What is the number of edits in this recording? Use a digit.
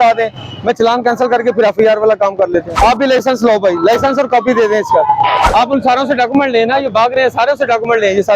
2